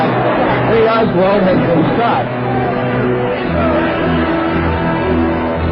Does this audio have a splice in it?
no; 0 cuts

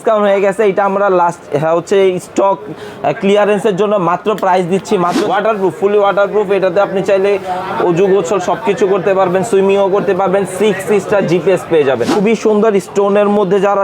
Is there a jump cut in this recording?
yes; 2 cuts; at 5.2 s, 12.1 s

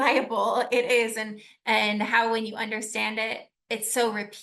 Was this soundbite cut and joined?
yes; 1 cut; at 3.5 s

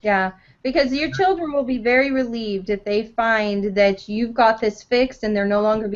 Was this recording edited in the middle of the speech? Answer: no; 0 cuts

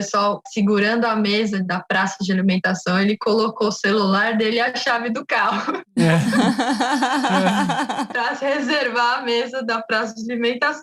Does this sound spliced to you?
no; 0 cuts

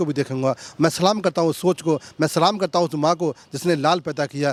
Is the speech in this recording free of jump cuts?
yes; 0 cuts

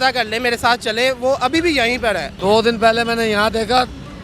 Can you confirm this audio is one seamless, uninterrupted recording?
no; 1 cut; at 2.3 s

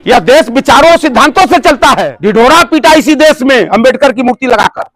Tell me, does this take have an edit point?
yes; 1 cut; at 2.1 s

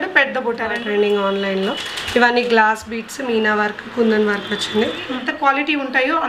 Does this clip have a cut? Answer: yes; 2 cuts; at 0.8 s, 5.1 s

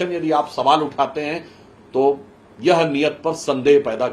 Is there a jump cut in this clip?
no; 0 cuts

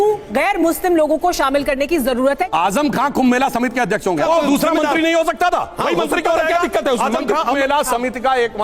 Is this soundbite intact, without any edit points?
no; 3 cuts; at 2.5 s, 4.2 s, 7.6 s

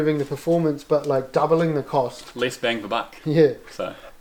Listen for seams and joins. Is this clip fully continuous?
yes; 0 cuts

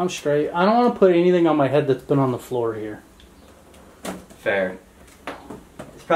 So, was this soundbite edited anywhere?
no; 0 cuts

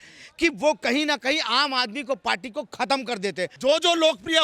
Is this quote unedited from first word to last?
no; 1 cut; at 3.5 s

